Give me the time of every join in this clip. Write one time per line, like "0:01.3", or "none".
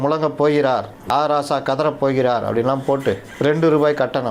0:01.0
0:03.3